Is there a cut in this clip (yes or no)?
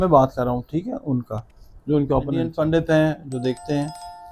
yes